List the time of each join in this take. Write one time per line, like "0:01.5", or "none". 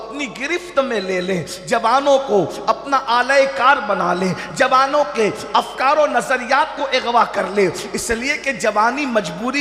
none